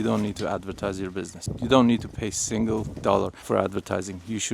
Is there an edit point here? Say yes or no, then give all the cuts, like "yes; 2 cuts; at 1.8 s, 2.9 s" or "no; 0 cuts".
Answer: yes; 2 cuts; at 1.4 s, 3.4 s